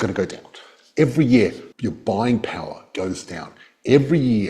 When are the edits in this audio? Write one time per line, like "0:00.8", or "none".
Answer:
0:01.7